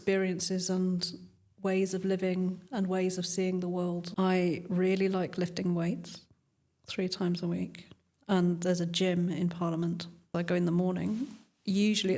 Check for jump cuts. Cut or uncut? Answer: cut